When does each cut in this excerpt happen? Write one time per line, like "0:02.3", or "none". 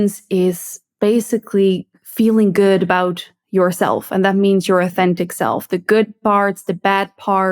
none